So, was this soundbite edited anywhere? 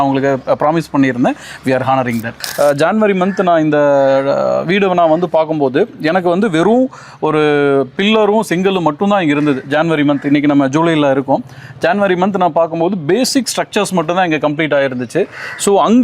yes; 1 cut; at 2.4 s

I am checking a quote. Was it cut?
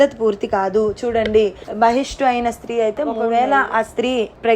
yes; 1 cut; at 3.2 s

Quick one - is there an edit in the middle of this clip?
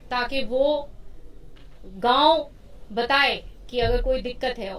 no; 0 cuts

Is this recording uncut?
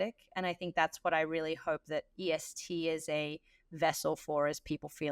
yes; 0 cuts

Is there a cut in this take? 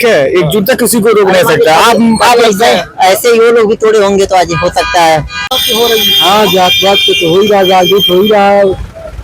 yes; 1 cut; at 5.5 s

